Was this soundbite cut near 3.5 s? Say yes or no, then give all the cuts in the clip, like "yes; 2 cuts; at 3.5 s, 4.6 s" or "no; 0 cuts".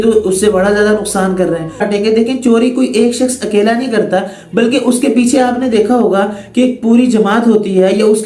no; 1 cut; at 1.8 s